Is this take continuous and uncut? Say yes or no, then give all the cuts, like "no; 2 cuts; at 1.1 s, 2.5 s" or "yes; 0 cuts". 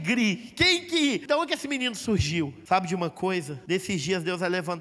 no; 3 cuts; at 1.2 s, 2.6 s, 3.6 s